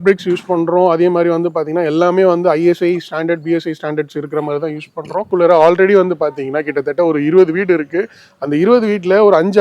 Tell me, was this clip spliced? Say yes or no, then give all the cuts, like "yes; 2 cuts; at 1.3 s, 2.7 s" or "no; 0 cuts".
yes; 1 cut; at 5.3 s